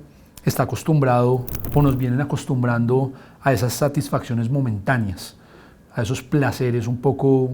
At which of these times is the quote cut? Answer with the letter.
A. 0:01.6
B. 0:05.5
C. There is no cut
A